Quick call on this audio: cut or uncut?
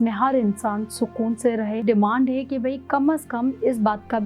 cut